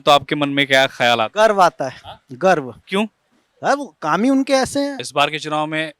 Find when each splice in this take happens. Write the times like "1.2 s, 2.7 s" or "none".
5.0 s